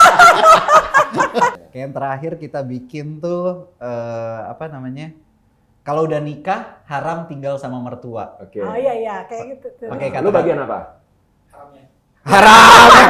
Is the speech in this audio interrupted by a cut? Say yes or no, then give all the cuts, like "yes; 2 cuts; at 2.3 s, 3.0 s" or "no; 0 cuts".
yes; 1 cut; at 1.5 s